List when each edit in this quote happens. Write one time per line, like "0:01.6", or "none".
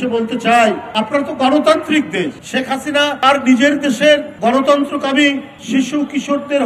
0:00.9
0:02.4
0:03.2
0:04.3
0:05.5